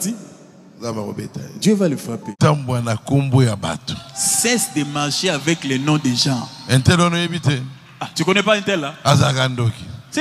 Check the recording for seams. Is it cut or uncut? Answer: cut